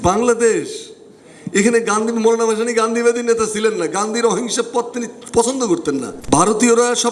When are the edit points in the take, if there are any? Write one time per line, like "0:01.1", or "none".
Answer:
0:06.1